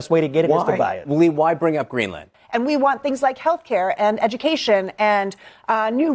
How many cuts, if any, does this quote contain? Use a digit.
1